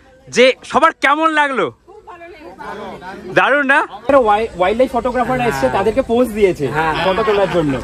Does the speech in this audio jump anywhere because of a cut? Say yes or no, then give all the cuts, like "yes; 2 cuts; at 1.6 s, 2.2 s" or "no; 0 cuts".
yes; 1 cut; at 4.1 s